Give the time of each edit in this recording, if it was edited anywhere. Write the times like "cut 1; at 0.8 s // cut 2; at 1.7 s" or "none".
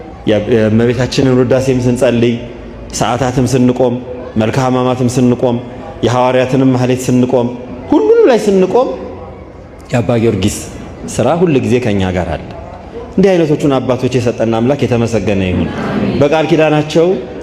none